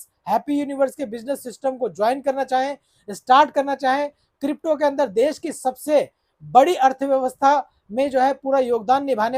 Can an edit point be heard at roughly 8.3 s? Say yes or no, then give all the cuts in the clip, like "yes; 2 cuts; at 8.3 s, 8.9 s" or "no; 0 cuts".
no; 0 cuts